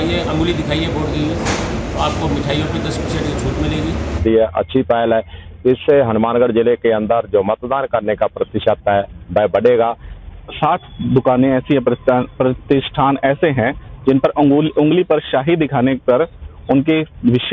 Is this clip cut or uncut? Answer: cut